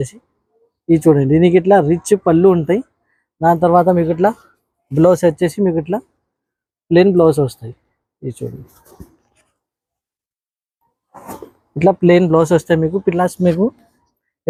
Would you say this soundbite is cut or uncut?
uncut